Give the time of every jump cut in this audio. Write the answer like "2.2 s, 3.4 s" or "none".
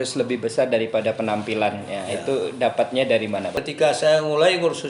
3.6 s